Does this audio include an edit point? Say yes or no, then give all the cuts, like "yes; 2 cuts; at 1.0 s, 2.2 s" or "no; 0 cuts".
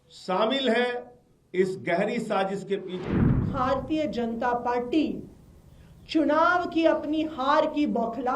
yes; 1 cut; at 3.0 s